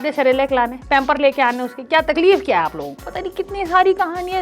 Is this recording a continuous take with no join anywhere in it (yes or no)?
no